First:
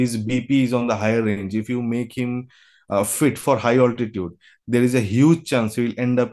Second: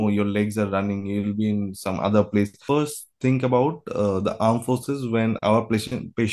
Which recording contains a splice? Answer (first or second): second